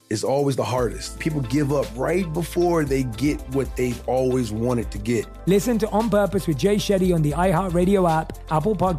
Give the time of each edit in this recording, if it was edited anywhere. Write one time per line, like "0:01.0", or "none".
0:01.2
0:05.3